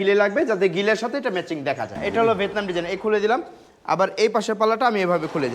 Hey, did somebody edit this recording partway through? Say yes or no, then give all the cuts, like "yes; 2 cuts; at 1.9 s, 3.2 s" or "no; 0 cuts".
yes; 1 cut; at 1.9 s